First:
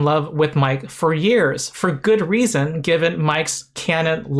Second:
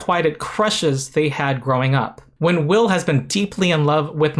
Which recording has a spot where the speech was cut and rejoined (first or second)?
second